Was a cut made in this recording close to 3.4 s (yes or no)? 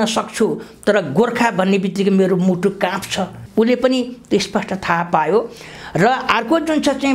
yes